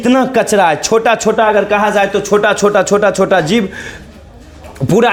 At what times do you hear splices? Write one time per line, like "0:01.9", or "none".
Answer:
none